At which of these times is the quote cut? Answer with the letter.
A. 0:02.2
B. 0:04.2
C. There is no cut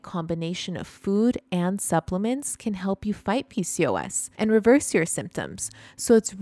B